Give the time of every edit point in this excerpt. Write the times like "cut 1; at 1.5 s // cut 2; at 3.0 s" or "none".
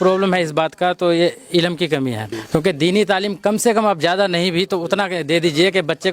cut 1; at 2.3 s